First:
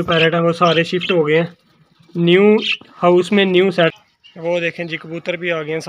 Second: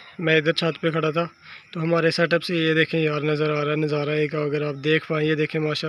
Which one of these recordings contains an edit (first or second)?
first